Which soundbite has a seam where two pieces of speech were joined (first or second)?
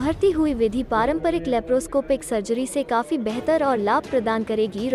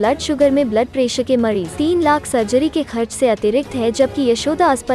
second